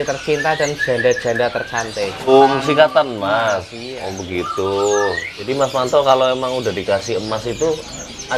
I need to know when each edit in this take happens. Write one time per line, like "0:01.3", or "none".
0:02.3
0:05.5